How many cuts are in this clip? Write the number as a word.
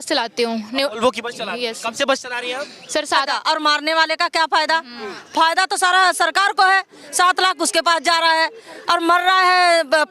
one